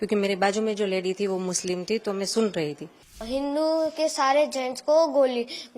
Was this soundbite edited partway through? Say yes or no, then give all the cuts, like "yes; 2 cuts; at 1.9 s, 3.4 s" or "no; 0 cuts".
yes; 1 cut; at 3.2 s